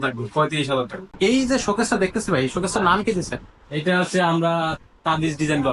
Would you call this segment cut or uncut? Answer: cut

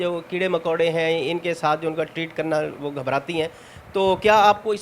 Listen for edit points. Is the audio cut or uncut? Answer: uncut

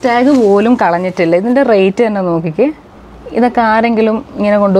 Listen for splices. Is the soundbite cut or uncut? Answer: uncut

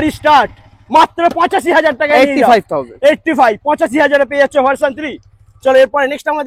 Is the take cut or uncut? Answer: uncut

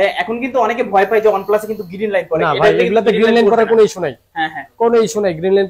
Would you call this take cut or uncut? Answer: uncut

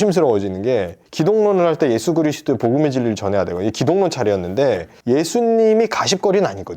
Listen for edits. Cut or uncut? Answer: cut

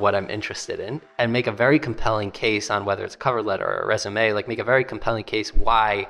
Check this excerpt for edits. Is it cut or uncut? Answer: uncut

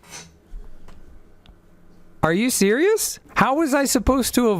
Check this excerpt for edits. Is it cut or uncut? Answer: cut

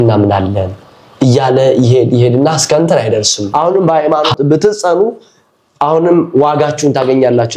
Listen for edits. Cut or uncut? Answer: cut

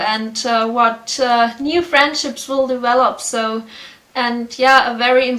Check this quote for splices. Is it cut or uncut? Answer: uncut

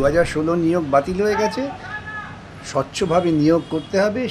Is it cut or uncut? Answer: uncut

